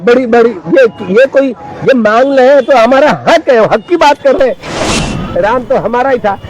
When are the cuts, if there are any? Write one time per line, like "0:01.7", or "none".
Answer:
0:04.8